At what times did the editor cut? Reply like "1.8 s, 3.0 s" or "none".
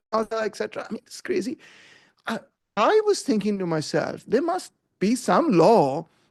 none

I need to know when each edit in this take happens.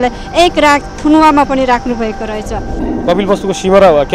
2.8 s

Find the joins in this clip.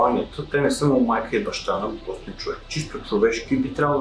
2.7 s

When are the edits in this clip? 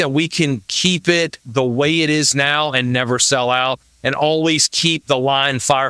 none

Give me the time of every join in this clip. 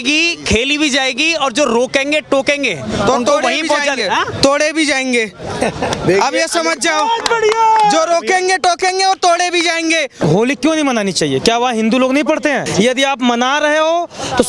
10.2 s, 12.7 s

